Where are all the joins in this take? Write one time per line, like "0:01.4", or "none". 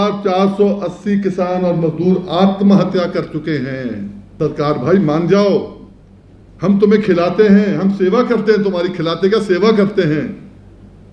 0:04.2